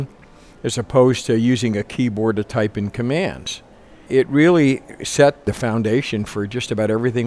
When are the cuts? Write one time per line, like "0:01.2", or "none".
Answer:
0:04.0
0:05.4